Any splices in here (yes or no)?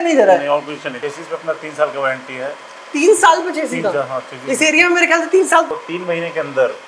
yes